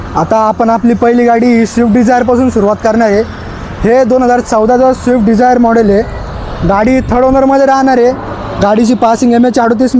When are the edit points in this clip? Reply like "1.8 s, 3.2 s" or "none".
none